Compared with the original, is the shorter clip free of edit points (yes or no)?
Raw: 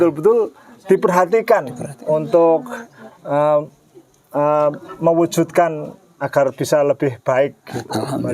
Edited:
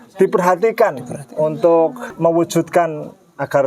no